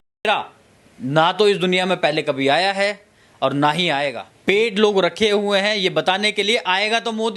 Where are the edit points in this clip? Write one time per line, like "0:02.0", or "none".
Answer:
0:04.3